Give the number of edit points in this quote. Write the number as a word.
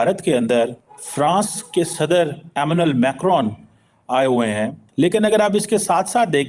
one